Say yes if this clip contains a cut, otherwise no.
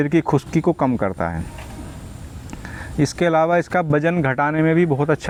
no